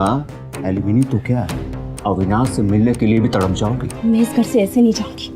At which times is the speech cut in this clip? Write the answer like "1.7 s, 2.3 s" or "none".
3.9 s